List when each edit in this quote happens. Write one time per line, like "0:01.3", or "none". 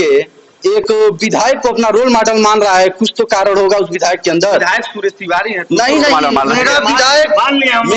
none

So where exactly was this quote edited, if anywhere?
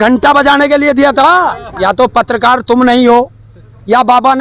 0:01.7

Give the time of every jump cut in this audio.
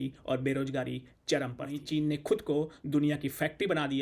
0:01.8

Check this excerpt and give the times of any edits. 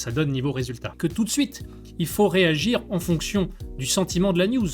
0:00.9

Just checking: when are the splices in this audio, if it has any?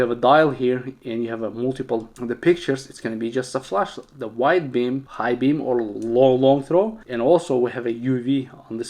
none

